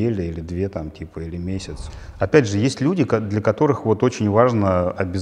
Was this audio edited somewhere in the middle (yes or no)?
yes